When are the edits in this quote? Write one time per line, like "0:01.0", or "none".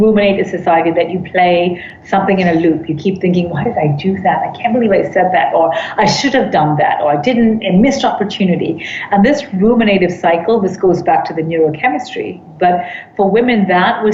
none